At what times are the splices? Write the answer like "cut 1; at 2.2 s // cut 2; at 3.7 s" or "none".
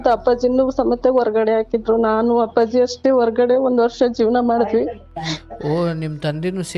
none